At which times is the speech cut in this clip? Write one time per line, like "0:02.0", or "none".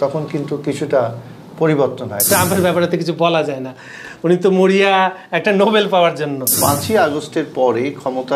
0:02.2
0:06.5